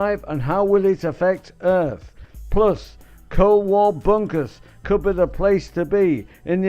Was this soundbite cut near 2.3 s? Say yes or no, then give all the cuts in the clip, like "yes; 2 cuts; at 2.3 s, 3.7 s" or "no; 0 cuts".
no; 1 cut; at 4.3 s